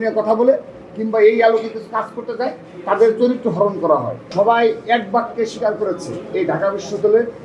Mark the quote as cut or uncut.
cut